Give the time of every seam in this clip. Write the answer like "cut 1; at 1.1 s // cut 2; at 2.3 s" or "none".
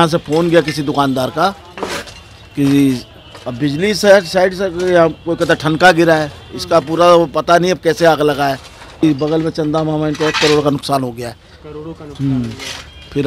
cut 1; at 9.0 s